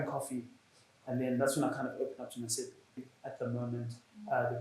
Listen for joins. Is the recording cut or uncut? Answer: cut